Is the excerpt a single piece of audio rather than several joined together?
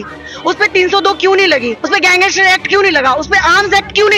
yes; 0 cuts

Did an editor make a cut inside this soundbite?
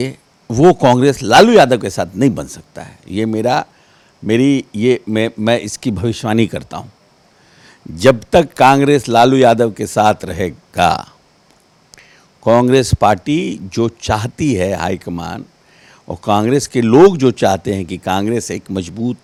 no; 0 cuts

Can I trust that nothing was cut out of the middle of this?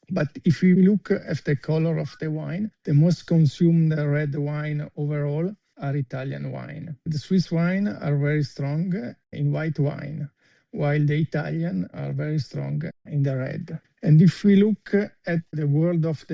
yes; 0 cuts

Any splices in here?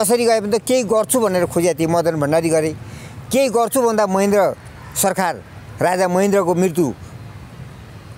no; 0 cuts

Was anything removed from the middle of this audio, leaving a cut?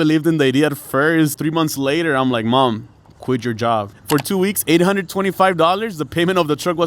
yes; 2 cuts; at 1.4 s, 4.0 s

